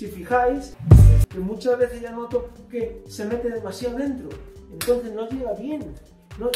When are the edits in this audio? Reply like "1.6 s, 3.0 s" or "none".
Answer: 1.0 s